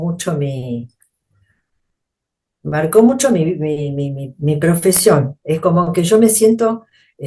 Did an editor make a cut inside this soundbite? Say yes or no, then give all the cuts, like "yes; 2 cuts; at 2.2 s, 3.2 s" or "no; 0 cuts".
no; 0 cuts